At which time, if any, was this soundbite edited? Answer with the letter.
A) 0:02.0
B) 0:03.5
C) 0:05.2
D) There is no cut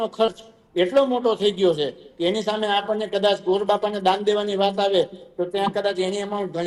D